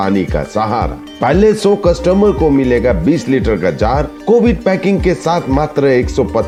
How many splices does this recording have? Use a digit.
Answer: 0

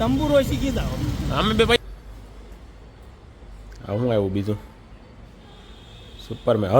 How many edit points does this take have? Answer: 1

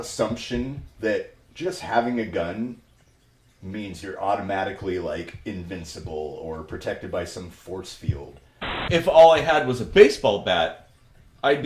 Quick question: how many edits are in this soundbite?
1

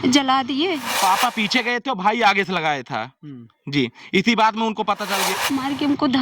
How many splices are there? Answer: 2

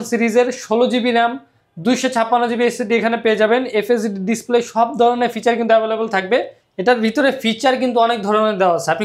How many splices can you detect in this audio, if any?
1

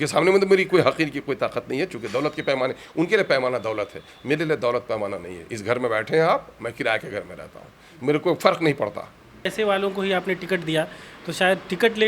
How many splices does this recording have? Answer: 1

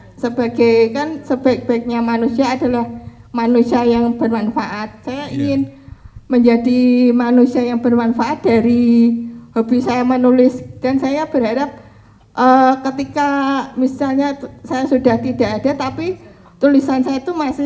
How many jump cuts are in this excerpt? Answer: 0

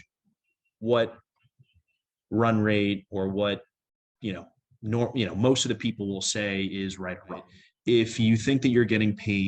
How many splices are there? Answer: 1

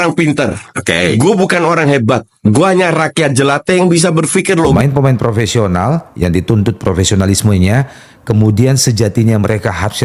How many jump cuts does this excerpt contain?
1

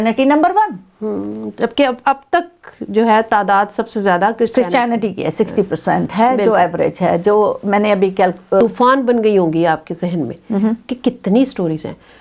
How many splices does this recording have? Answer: 1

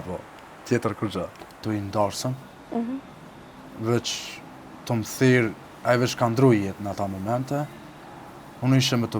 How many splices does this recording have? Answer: 1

